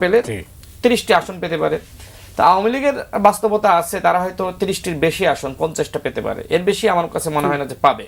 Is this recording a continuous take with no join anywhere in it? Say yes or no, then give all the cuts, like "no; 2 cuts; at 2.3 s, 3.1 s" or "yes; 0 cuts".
yes; 0 cuts